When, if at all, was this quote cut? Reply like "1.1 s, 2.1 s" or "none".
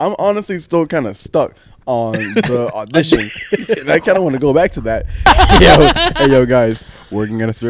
5.3 s